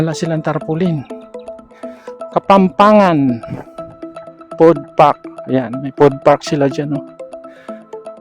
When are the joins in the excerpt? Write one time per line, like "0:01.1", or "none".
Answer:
0:01.0
0:02.3
0:07.0